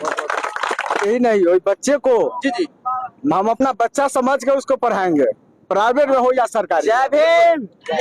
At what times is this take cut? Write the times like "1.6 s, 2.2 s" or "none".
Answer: 1.0 s